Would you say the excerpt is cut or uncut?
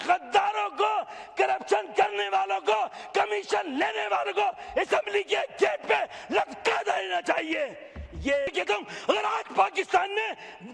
cut